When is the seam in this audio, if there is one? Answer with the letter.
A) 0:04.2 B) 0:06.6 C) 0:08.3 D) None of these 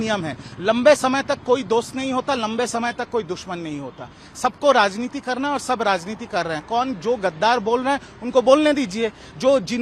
D